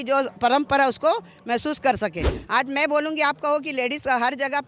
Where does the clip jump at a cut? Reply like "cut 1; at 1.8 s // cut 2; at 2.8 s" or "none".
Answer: cut 1; at 2.3 s